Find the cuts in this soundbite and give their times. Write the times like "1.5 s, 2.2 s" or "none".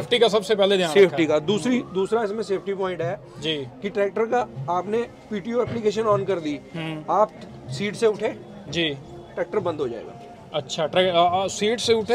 none